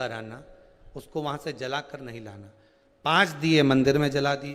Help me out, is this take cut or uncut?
uncut